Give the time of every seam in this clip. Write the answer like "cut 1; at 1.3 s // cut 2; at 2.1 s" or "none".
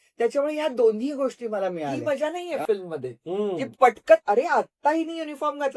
cut 1; at 1.9 s